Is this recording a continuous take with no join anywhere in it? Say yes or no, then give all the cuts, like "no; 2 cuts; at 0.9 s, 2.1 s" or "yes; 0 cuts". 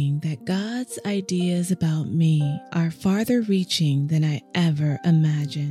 yes; 0 cuts